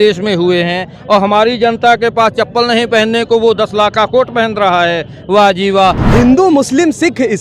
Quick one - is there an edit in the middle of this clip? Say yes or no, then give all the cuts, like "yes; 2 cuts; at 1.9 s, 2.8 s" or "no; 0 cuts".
yes; 1 cut; at 6.0 s